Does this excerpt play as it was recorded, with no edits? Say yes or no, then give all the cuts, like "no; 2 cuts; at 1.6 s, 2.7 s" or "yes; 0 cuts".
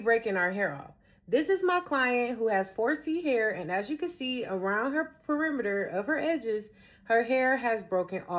yes; 0 cuts